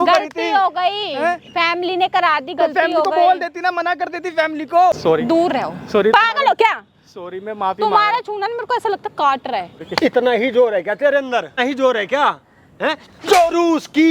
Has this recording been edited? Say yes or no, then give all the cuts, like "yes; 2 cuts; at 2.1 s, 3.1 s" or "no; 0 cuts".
yes; 3 cuts; at 5.0 s, 9.8 s, 11.6 s